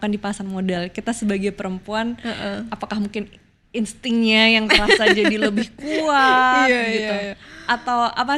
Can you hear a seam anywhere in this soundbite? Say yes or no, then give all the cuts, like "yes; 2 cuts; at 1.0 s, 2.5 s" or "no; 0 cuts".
no; 0 cuts